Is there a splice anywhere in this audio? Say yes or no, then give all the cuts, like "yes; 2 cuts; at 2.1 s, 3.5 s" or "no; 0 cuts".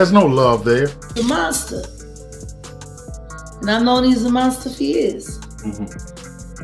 yes; 1 cut; at 1.0 s